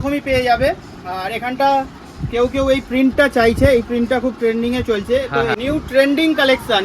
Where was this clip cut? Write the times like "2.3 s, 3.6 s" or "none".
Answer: 5.6 s